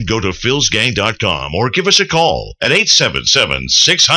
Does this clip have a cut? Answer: no; 0 cuts

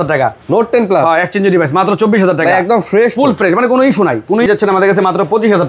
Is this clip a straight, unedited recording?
no; 1 cut; at 4.5 s

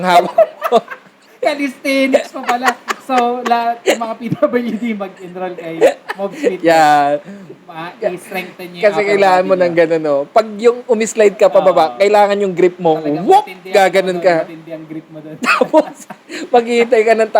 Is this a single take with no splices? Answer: yes; 0 cuts

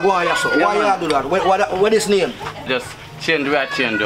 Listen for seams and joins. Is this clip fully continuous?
no; 1 cut; at 2.7 s

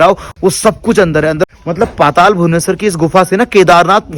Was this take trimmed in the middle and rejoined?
yes; 1 cut; at 1.5 s

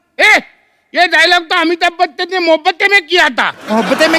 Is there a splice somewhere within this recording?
no; 0 cuts

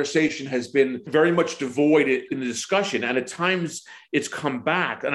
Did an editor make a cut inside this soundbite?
yes; 2 cuts; at 1.0 s, 2.3 s

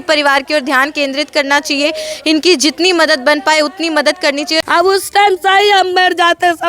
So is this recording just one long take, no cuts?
no; 1 cut; at 4.6 s

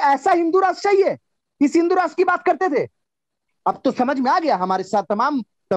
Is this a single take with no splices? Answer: yes; 0 cuts

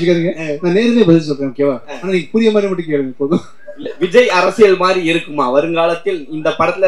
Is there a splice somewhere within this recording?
no; 0 cuts

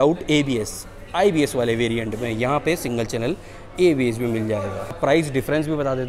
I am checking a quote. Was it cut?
yes; 1 cut; at 5.0 s

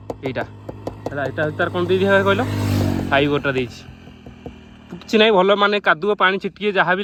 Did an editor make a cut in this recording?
no; 0 cuts

